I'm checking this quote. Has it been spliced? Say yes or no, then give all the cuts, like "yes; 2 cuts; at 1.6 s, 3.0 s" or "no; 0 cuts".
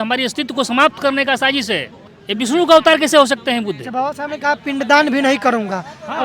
no; 0 cuts